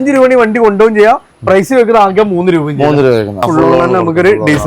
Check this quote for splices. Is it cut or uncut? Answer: cut